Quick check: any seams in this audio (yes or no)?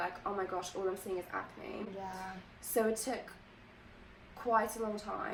no